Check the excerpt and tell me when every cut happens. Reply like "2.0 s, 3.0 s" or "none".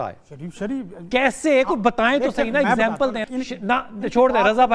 3.3 s